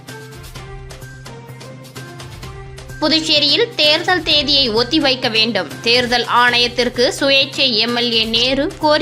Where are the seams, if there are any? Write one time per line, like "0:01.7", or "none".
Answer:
0:00.9